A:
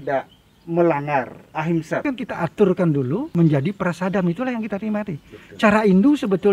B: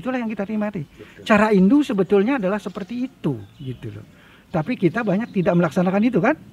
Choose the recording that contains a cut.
A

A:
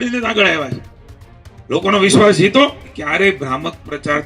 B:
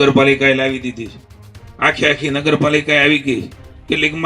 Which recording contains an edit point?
A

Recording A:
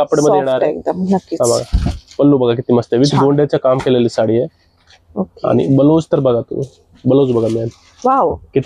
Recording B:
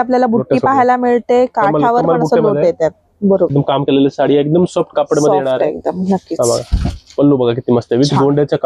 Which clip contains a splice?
B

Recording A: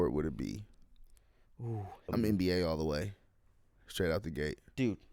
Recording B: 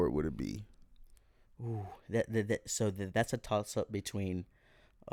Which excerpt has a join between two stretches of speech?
A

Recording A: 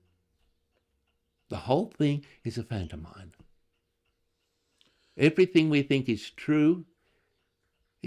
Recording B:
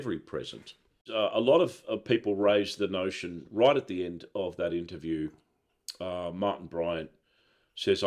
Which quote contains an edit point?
B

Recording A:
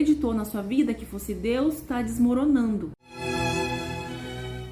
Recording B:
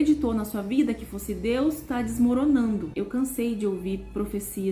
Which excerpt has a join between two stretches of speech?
B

